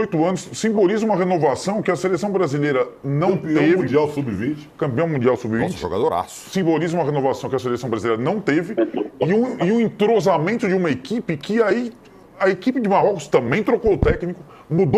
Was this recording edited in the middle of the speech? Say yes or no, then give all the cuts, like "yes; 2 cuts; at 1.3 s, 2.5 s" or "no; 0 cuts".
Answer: no; 0 cuts